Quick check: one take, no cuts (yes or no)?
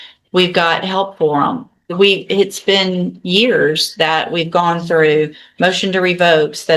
yes